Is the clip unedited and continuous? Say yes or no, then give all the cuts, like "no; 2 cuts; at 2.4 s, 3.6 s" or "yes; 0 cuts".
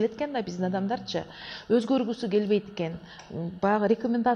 yes; 0 cuts